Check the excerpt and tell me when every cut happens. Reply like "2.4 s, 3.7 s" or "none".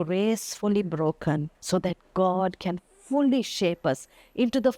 1.5 s